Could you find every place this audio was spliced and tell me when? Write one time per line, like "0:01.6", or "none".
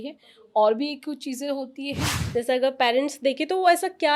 0:02.2